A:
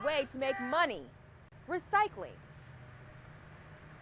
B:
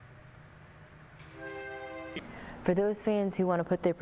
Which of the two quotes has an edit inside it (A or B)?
B